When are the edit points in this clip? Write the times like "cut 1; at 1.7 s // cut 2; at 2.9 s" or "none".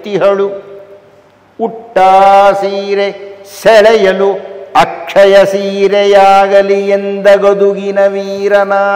none